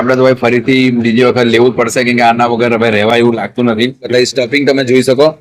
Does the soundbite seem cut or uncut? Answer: cut